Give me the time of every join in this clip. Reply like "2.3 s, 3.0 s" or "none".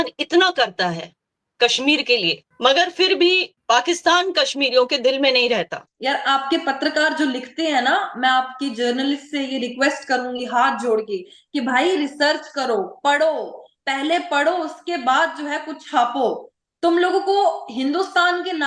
2.5 s, 3.5 s, 5.8 s